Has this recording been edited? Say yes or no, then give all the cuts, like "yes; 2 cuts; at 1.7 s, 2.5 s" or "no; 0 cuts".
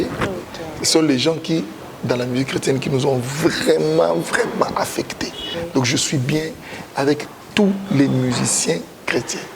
yes; 1 cut; at 5.5 s